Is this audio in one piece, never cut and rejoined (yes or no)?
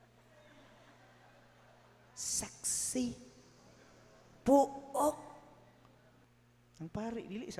no